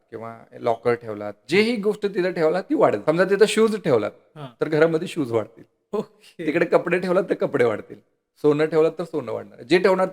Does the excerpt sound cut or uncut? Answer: cut